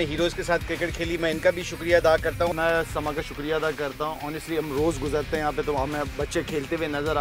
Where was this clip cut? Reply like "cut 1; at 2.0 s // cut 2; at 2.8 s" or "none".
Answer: cut 1; at 2.5 s